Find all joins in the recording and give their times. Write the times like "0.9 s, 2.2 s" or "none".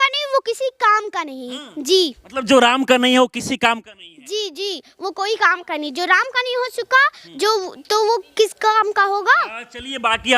none